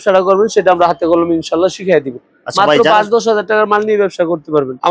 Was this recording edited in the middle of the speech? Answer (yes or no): no